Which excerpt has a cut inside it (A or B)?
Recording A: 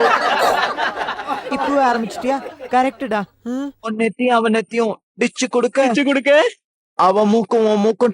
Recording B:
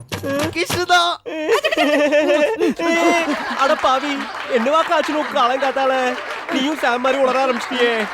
A